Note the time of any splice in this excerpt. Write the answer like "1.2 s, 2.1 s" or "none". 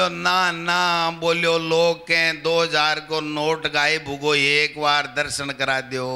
none